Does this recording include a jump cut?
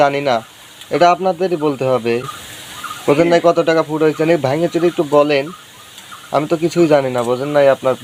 no; 0 cuts

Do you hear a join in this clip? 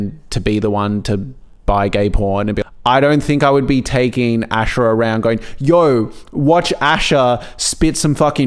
yes; 1 cut; at 2.6 s

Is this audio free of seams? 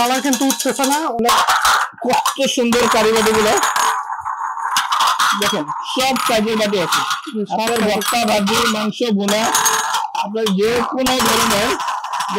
no; 1 cut; at 1.2 s

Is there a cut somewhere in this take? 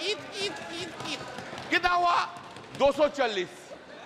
no; 0 cuts

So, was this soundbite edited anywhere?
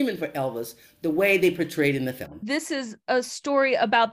yes; 1 cut; at 2.3 s

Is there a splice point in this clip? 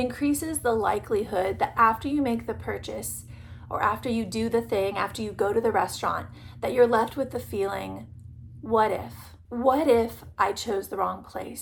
no; 0 cuts

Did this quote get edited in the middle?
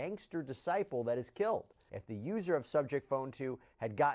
yes; 1 cut; at 1.7 s

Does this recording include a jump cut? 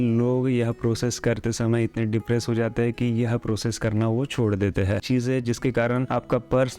yes; 1 cut; at 5.0 s

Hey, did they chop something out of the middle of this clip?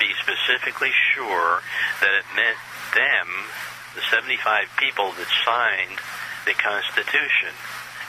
no; 0 cuts

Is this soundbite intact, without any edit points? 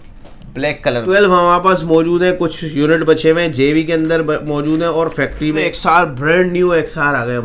no; 2 cuts; at 1.0 s, 5.6 s

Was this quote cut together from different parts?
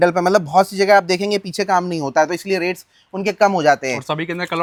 no; 0 cuts

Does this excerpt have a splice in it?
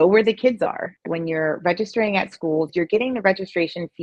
yes; 2 cuts; at 1.0 s, 2.7 s

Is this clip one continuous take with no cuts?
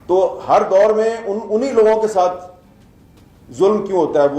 yes; 0 cuts

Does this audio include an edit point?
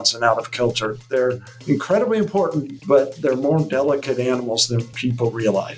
yes; 2 cuts; at 2.7 s, 4.9 s

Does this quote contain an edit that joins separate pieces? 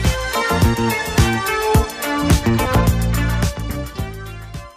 yes; 1 cut; at 2.8 s

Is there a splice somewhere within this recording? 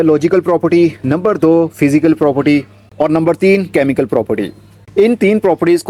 no; 0 cuts

